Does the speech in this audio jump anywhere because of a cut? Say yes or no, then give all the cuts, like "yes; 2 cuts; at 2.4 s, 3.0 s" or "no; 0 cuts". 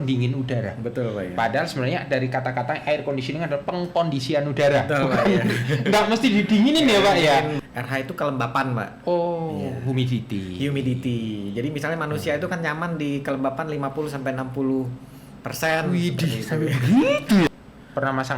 yes; 2 cuts; at 7.6 s, 17.5 s